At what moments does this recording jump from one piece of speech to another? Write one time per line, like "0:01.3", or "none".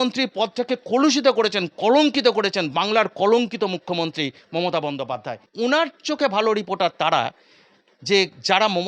0:05.3